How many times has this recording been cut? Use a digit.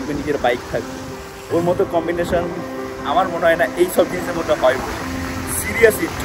0